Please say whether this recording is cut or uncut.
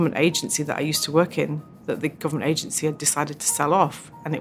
uncut